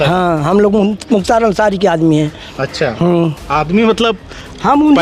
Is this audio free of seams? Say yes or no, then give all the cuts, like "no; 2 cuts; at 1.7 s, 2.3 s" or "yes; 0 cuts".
yes; 0 cuts